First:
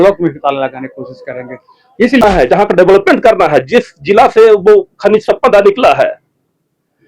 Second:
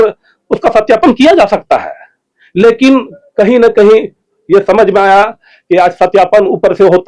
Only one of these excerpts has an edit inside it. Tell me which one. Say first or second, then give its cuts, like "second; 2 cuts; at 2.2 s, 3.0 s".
first; 1 cut; at 2.2 s